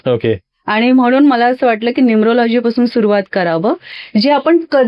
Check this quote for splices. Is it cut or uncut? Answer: cut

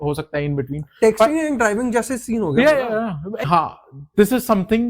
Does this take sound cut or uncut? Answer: cut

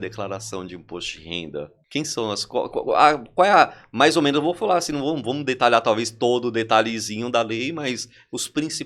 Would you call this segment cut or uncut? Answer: cut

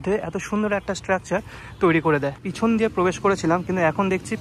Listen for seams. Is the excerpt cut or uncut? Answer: cut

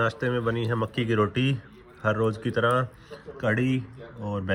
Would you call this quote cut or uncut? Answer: uncut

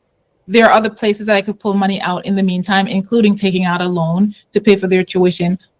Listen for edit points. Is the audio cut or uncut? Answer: uncut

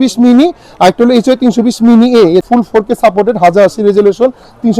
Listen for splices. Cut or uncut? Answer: cut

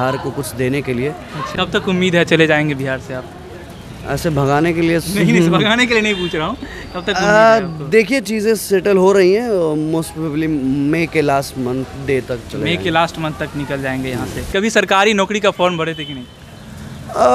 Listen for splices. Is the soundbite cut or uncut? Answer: cut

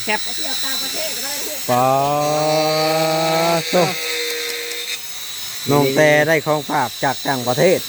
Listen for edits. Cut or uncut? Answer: uncut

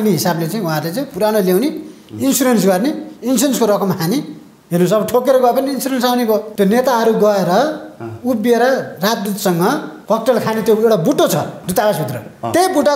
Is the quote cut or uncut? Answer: cut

